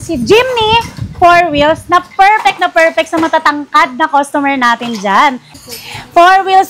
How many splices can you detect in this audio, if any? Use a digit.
1